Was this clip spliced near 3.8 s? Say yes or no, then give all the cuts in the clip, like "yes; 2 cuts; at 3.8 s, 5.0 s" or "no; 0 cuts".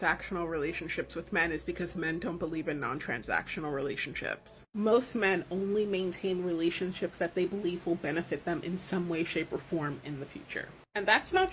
no; 0 cuts